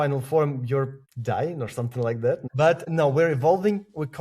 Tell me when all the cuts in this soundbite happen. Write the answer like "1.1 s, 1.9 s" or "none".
1.1 s, 2.9 s

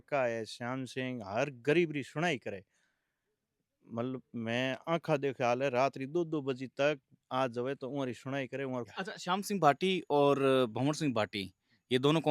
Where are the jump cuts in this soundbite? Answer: 8.9 s

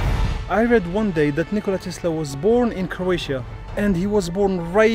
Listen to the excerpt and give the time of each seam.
3.5 s

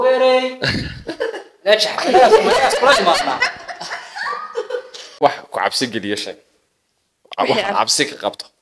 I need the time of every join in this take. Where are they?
5.1 s

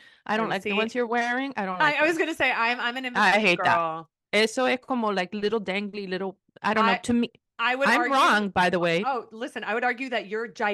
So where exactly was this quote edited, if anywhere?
none

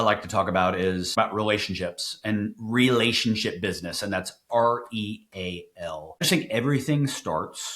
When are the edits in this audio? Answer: 1.2 s, 6.2 s

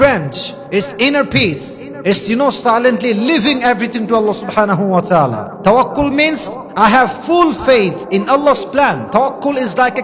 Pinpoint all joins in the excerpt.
9.0 s

